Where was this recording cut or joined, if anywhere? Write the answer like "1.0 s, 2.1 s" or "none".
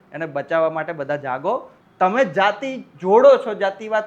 1.8 s